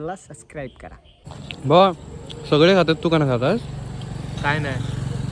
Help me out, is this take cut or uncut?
cut